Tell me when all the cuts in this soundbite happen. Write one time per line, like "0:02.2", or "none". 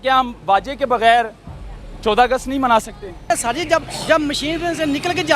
0:03.2